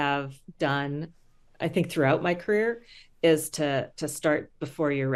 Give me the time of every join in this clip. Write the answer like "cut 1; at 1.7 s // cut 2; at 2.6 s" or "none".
none